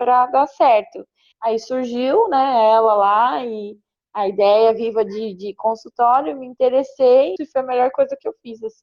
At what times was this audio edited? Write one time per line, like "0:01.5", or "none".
0:07.3

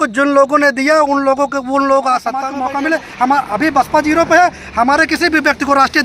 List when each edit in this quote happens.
0:02.5

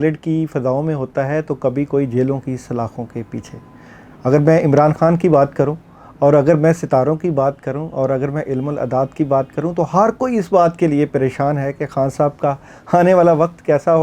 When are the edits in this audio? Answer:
none

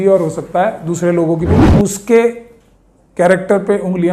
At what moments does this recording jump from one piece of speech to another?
0:01.6

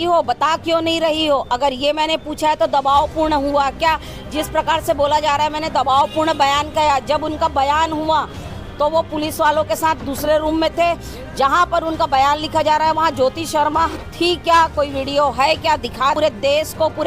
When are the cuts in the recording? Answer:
0:16.2

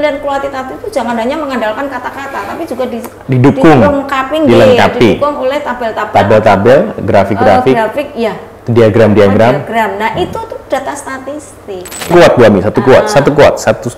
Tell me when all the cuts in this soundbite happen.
0:12.1

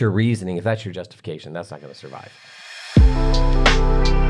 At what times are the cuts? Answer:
0:02.4

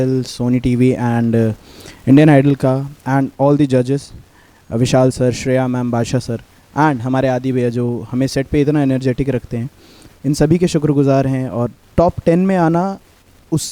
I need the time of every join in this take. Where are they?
none

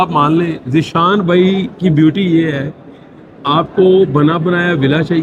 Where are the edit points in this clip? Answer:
none

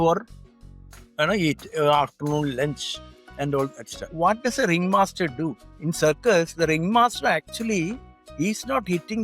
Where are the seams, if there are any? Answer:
0:04.1
0:05.7

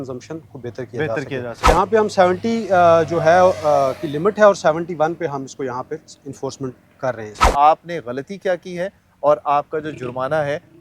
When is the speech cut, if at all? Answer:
0:01.7
0:07.4

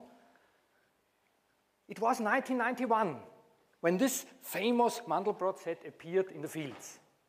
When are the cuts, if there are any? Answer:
0:06.3

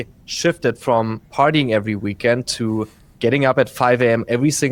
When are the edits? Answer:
none

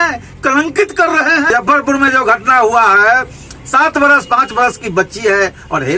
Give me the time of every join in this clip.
0:01.5

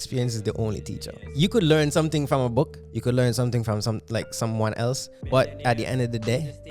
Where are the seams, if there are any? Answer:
0:01.2
0:02.8

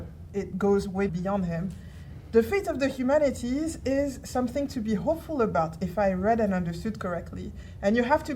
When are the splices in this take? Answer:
0:01.1

